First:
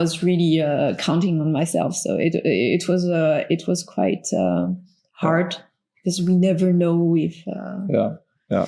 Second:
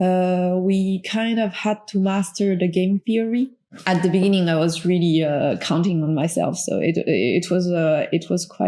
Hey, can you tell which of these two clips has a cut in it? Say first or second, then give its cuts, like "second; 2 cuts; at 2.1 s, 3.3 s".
second; 1 cut; at 3.7 s